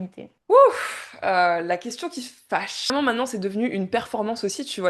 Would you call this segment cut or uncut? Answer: cut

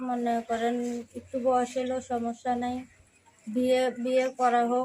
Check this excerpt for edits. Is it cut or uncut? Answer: uncut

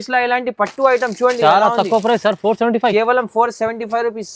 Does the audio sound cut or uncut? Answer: uncut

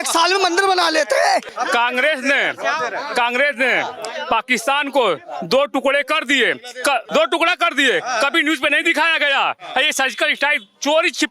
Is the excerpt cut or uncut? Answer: cut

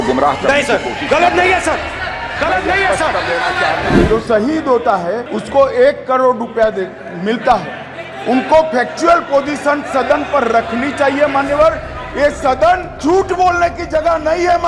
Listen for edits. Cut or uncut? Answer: cut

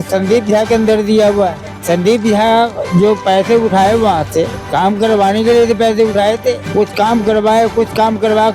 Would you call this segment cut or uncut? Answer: cut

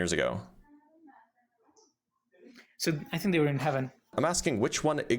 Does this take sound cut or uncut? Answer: cut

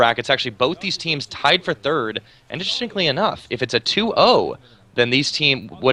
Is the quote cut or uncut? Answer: uncut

